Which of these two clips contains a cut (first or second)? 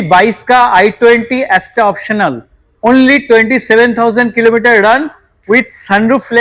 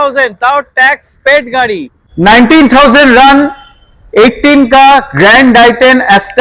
second